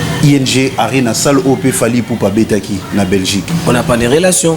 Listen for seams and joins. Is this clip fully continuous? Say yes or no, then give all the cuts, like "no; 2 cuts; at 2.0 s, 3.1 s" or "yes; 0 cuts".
no; 1 cut; at 3.5 s